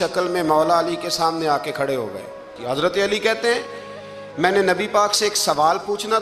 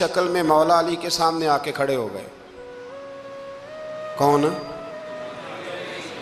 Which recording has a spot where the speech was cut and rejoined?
first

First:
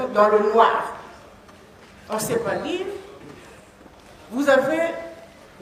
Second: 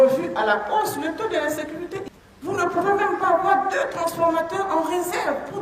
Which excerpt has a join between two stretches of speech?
second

